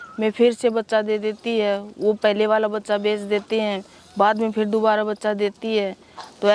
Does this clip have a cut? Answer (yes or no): no